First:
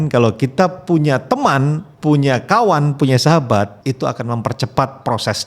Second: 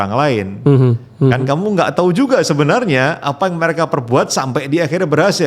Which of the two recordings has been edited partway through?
first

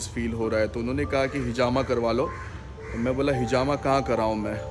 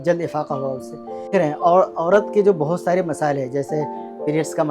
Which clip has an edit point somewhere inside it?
second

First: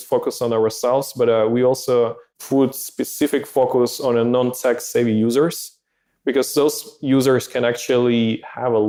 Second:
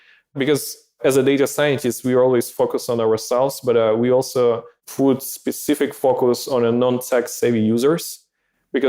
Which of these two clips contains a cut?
second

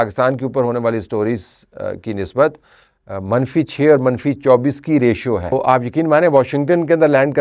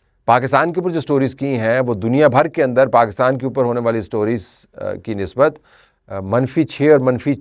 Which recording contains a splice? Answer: first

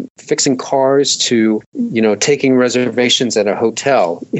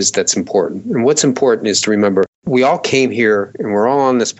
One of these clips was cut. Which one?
first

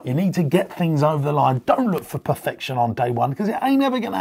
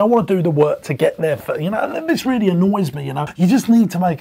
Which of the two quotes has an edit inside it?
second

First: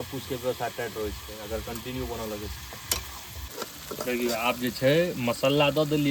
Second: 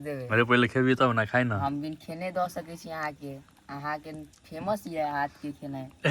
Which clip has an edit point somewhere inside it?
first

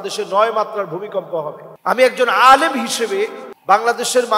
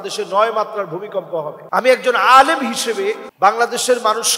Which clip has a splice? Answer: second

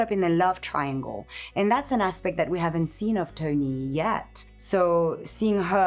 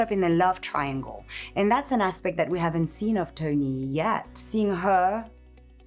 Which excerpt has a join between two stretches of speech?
second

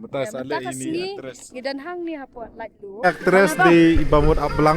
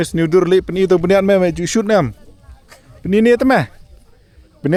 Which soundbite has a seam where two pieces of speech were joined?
first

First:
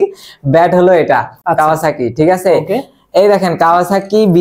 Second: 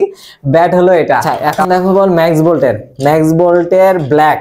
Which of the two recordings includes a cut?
second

